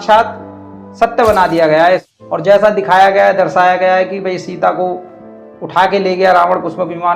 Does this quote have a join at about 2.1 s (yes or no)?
yes